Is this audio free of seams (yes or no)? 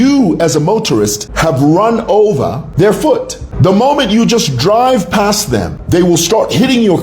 no